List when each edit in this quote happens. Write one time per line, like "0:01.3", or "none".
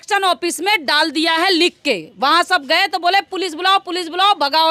none